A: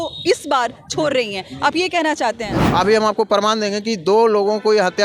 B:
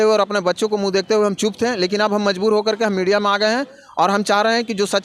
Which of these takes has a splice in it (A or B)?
A